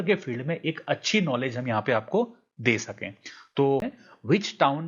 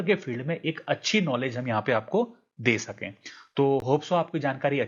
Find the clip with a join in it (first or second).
first